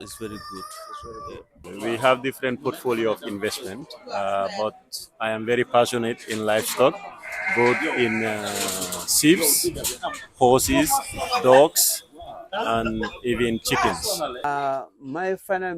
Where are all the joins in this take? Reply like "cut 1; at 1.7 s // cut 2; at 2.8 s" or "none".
cut 1; at 1.7 s // cut 2; at 14.4 s